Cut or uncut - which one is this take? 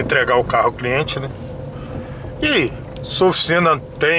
uncut